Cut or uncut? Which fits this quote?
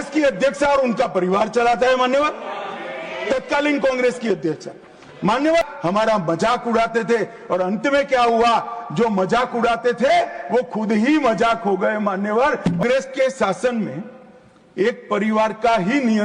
cut